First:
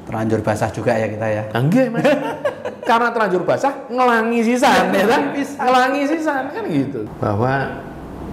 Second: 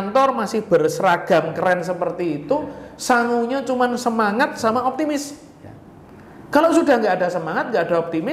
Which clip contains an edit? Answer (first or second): first